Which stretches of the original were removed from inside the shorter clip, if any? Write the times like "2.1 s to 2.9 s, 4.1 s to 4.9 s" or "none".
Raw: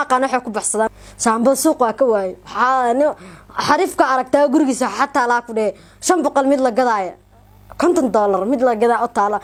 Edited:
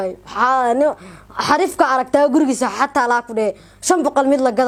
none